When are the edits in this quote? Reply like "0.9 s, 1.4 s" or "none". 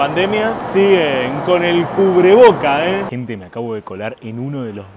3.1 s